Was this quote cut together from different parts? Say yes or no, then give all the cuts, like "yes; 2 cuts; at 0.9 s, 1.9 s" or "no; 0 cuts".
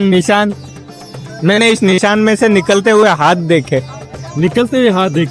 no; 0 cuts